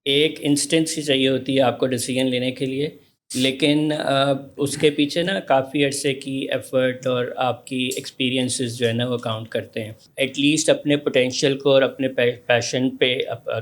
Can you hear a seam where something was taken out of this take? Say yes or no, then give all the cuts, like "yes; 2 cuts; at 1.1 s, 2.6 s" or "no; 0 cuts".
yes; 1 cut; at 10.0 s